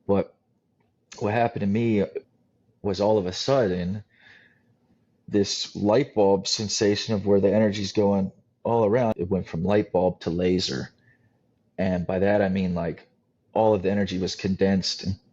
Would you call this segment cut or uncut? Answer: cut